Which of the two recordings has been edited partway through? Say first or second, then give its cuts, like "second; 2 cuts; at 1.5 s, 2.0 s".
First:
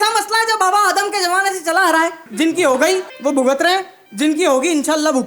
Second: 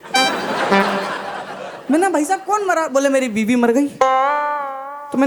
first; 3 cuts; at 2.2 s, 3.1 s, 4.0 s